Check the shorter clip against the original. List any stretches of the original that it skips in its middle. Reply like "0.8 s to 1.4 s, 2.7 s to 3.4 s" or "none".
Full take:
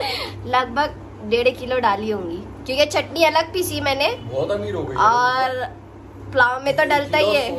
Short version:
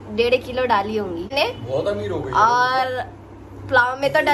2.5 s to 4.0 s